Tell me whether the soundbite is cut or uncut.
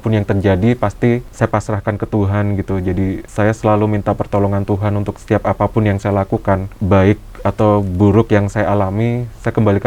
cut